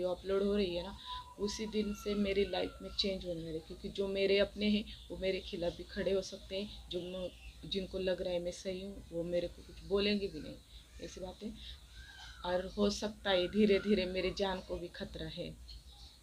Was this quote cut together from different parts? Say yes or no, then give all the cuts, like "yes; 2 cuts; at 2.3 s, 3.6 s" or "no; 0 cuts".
no; 0 cuts